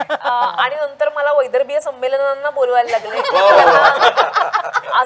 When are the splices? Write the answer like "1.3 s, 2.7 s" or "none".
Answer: none